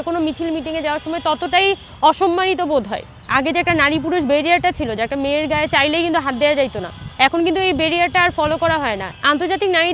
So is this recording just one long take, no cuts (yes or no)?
no